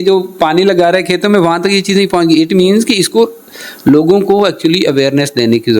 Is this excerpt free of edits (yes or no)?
yes